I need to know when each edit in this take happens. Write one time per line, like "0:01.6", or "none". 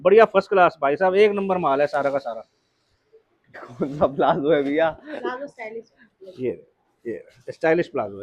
0:03.6